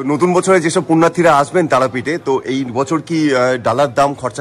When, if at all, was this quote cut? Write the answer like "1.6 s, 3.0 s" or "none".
none